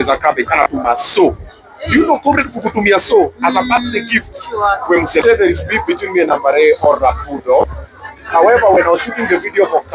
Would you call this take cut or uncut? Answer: cut